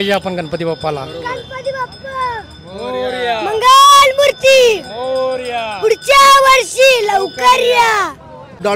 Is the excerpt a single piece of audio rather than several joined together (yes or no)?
yes